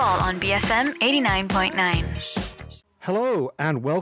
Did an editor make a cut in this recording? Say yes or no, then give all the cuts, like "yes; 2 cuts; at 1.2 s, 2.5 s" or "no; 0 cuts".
yes; 1 cut; at 2.7 s